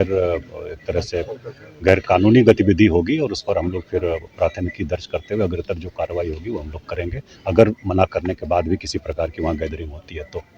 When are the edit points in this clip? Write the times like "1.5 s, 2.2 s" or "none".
none